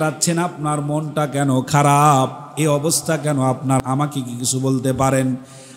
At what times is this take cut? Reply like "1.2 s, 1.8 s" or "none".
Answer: 3.8 s